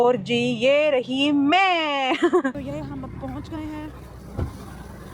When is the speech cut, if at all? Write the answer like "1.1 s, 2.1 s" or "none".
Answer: 2.5 s